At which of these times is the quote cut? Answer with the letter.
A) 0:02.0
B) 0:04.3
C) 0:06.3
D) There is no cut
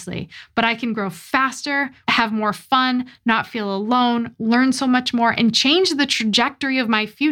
A